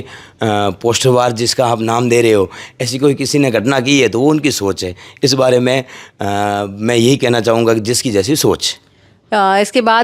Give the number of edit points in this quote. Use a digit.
0